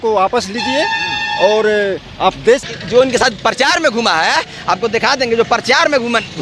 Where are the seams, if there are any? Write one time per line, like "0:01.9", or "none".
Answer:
0:02.7